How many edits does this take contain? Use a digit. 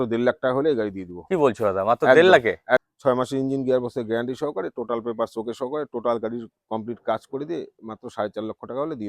1